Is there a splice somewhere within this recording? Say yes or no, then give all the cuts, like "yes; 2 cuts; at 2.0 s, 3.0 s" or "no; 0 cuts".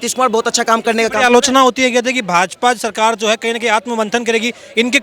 no; 0 cuts